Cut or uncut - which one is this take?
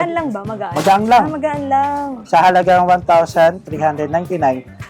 cut